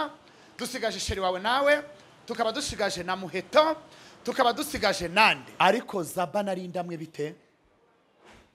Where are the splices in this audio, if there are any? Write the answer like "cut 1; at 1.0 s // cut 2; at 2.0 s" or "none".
cut 1; at 5.4 s